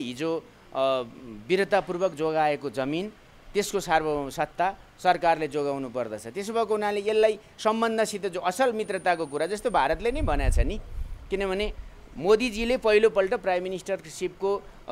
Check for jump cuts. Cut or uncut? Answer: uncut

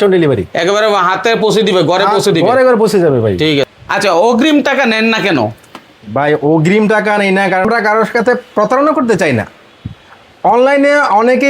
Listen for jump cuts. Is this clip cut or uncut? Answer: cut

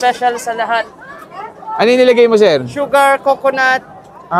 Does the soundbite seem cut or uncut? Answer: uncut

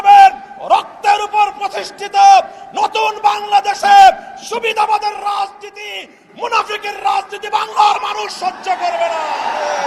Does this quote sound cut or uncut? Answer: uncut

